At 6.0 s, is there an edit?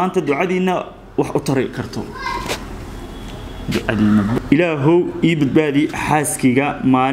no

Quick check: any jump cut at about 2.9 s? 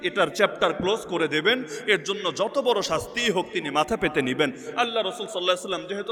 no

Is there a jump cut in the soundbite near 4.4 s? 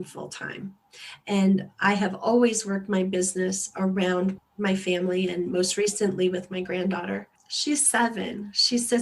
yes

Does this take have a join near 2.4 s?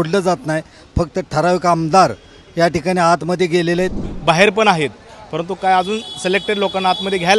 no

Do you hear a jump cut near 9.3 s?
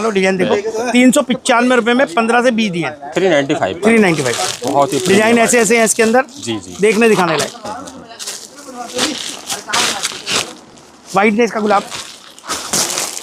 no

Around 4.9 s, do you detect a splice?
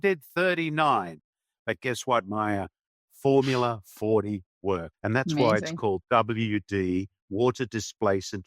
yes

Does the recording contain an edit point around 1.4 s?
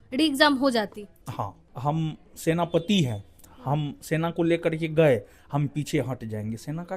yes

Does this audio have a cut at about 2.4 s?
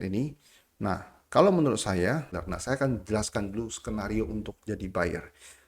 yes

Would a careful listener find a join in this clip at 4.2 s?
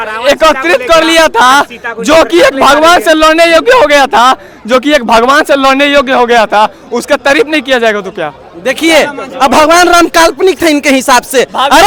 no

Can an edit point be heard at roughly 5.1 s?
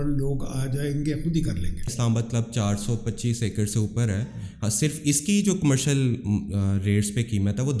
no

